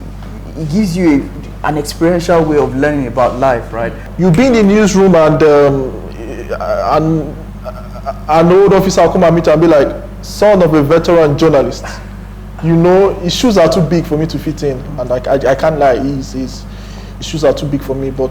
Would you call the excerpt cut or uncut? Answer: cut